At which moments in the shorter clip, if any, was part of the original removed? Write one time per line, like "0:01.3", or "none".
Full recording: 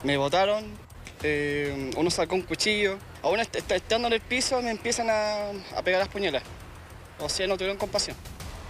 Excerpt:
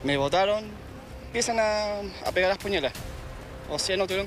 0:01.2